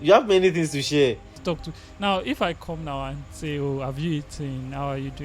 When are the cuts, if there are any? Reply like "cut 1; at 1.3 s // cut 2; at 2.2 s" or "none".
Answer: cut 1; at 1.4 s